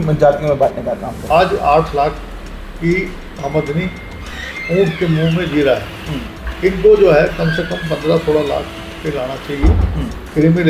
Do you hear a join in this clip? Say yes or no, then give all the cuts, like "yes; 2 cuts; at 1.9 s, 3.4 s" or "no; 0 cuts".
yes; 1 cut; at 1.2 s